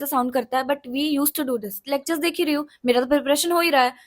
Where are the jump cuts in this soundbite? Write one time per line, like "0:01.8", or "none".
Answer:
0:01.8